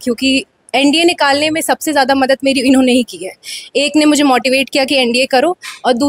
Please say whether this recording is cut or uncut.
uncut